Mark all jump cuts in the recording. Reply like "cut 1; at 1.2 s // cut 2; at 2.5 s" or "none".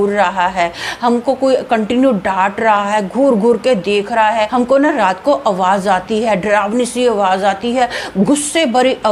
cut 1; at 4.5 s